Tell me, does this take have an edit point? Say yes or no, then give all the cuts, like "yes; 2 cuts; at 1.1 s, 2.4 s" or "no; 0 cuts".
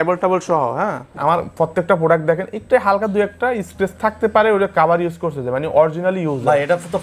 yes; 1 cut; at 1.1 s